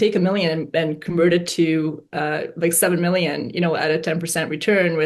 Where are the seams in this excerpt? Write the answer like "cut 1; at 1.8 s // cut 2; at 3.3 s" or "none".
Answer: none